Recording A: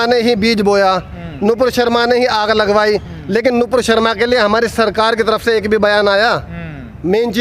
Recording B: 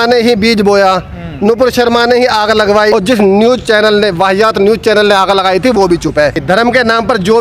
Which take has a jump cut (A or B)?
B